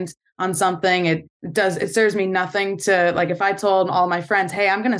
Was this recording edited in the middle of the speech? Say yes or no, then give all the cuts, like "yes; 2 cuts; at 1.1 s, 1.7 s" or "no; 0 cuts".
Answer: yes; 1 cut; at 1.4 s